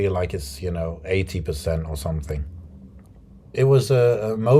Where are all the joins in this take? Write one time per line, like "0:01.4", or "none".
0:03.5